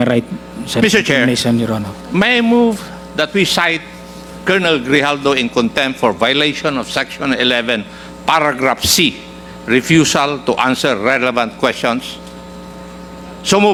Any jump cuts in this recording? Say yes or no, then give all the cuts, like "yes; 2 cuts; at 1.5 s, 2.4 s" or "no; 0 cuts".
no; 0 cuts